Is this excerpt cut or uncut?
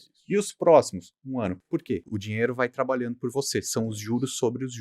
cut